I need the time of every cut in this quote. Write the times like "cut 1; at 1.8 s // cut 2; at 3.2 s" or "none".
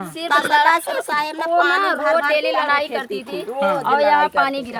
none